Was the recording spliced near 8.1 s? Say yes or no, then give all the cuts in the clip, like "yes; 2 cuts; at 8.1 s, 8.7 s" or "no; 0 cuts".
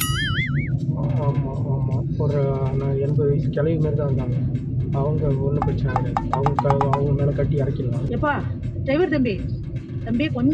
yes; 1 cut; at 8.1 s